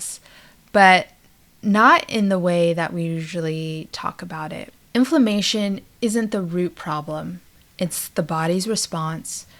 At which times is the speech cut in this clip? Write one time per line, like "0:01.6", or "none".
none